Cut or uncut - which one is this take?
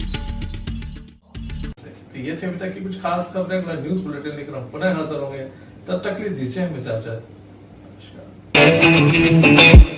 uncut